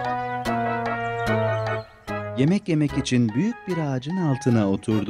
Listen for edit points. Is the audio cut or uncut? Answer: cut